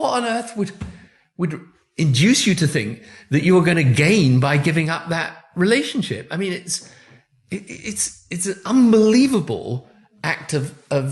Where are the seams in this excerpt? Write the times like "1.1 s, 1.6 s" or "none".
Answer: none